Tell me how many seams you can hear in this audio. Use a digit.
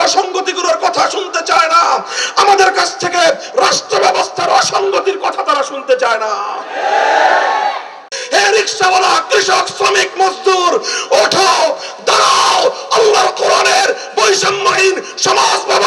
1